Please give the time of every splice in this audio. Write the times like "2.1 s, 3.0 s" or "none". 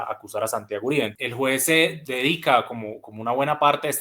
1.1 s, 2.0 s